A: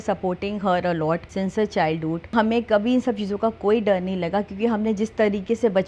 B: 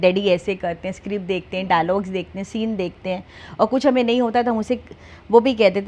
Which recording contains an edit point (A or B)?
A